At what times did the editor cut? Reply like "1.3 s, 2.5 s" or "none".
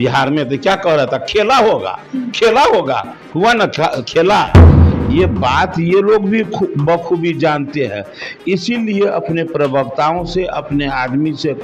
4.6 s